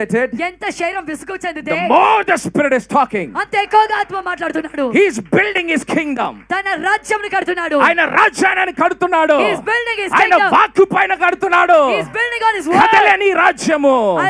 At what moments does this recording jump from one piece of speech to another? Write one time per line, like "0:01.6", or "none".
none